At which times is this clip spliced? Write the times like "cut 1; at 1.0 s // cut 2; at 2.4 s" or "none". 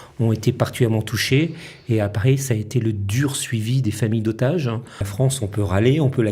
cut 1; at 5.1 s